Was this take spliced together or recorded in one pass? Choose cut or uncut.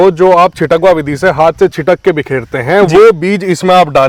uncut